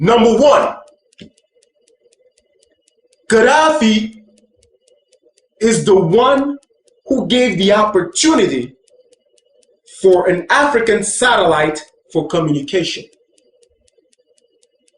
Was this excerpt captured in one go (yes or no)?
yes